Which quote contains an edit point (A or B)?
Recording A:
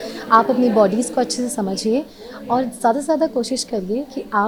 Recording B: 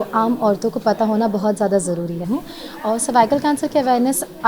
B